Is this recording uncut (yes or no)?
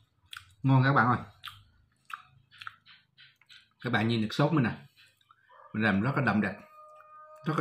yes